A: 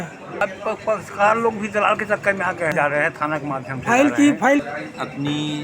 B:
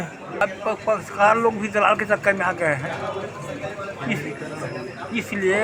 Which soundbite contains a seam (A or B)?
A